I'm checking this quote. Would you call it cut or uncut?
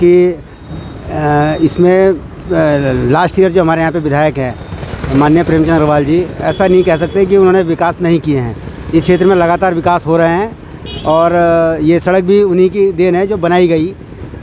uncut